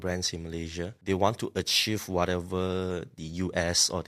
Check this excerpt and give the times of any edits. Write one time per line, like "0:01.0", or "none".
0:01.0